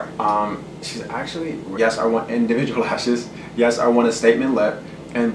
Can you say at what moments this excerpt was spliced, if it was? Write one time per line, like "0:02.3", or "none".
0:01.7